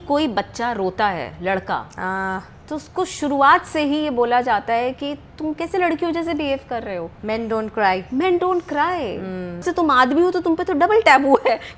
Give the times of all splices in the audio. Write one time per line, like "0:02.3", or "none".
0:07.1
0:09.7